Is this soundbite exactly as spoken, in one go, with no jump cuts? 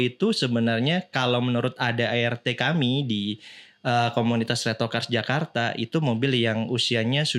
yes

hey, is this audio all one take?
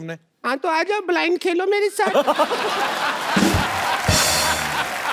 yes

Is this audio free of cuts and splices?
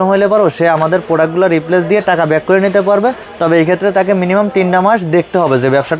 yes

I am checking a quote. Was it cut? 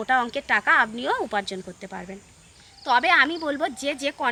no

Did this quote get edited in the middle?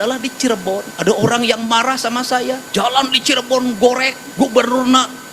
yes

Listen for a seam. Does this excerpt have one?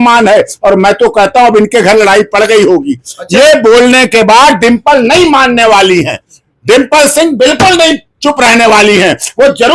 no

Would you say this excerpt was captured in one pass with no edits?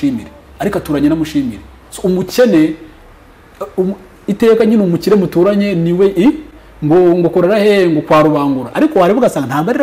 yes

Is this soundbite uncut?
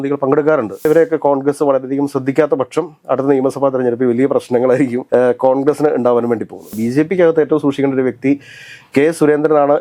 no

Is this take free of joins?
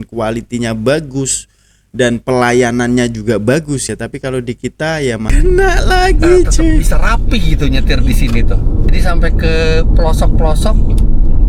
no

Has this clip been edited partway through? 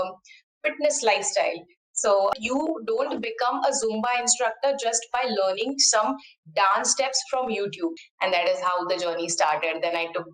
yes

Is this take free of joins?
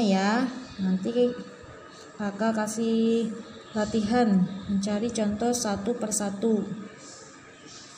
yes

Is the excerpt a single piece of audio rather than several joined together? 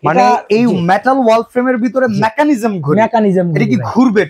yes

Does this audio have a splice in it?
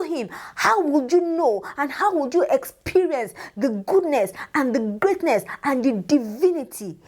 no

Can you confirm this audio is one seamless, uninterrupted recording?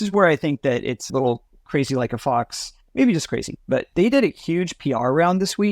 no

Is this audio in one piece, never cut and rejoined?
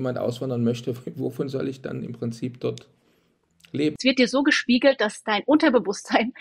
no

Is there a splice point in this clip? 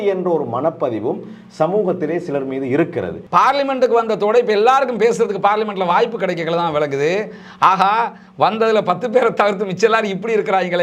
yes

